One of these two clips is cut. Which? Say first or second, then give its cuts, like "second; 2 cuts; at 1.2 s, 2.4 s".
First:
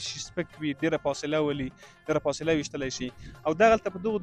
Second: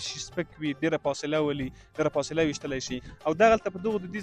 second; 2 cuts; at 1.8 s, 3.0 s